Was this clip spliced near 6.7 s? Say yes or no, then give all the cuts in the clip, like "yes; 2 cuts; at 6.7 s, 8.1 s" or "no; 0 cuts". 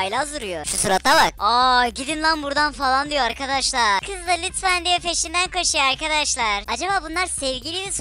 yes; 2 cuts; at 4.0 s, 6.7 s